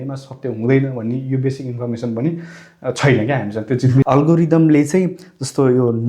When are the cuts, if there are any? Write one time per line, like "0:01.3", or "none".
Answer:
0:04.0